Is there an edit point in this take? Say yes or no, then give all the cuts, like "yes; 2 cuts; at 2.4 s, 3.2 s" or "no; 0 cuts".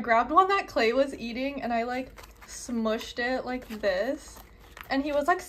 no; 0 cuts